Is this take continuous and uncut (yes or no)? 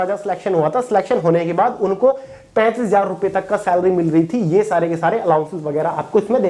yes